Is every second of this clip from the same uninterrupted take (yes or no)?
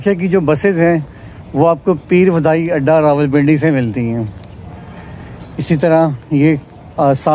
yes